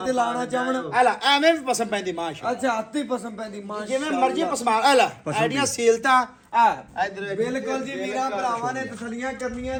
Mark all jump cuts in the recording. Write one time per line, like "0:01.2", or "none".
none